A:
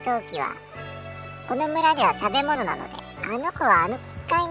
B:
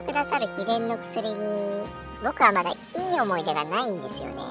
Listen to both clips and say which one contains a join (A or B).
A